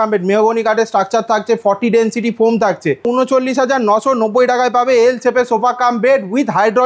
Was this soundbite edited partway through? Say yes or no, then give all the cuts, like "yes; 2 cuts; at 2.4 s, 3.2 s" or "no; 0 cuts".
yes; 1 cut; at 3.0 s